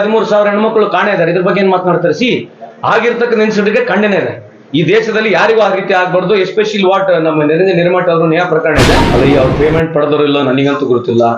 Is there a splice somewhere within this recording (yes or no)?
yes